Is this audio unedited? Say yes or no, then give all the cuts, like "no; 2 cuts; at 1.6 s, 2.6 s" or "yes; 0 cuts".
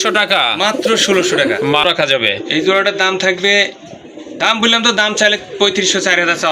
no; 1 cut; at 1.8 s